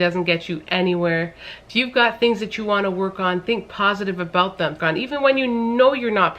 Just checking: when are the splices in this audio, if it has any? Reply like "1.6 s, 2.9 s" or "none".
4.8 s